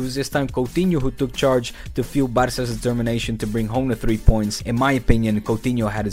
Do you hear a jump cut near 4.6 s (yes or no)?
yes